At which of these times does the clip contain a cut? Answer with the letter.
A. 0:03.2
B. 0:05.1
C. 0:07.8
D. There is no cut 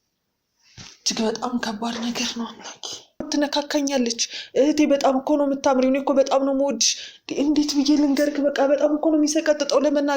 A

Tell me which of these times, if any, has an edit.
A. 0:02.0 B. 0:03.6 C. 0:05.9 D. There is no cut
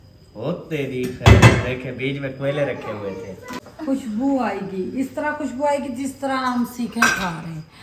B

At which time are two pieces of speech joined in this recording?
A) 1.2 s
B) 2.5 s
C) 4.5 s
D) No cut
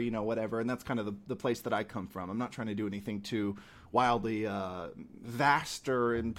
D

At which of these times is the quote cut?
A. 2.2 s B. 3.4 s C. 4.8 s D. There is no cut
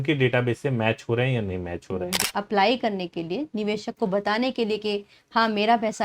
A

